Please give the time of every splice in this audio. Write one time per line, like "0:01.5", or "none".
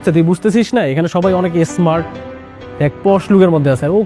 none